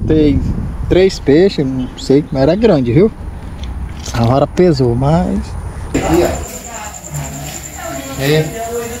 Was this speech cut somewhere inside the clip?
yes; 1 cut; at 5.9 s

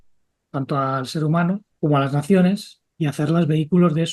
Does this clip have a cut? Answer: yes; 1 cut; at 1.7 s

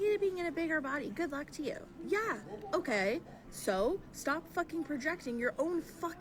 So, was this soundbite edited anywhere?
no; 0 cuts

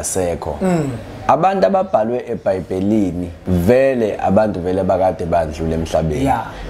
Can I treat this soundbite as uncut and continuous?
no; 1 cut; at 3.3 s

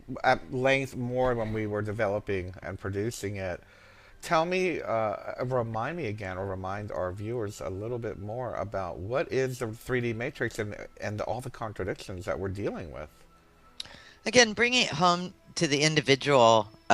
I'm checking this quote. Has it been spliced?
yes; 1 cut; at 9.1 s

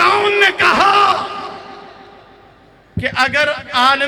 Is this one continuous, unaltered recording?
yes; 0 cuts

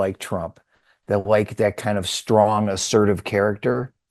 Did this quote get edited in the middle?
no; 0 cuts

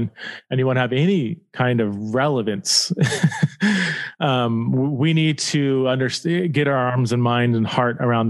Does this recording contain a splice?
no; 0 cuts

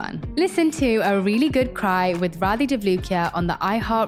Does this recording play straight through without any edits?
yes; 0 cuts

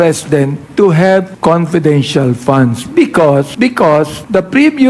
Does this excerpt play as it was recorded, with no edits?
no; 2 cuts; at 1.3 s, 4.0 s

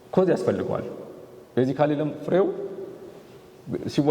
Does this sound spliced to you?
no; 0 cuts

